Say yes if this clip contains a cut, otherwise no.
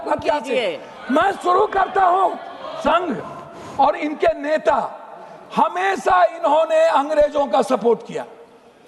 yes